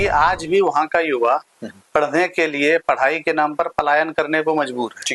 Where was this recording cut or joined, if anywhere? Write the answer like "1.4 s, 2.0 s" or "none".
none